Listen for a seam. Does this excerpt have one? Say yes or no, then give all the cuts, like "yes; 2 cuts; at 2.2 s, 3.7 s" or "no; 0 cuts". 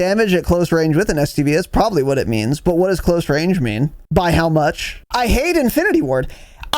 yes; 2 cuts; at 4.0 s, 4.9 s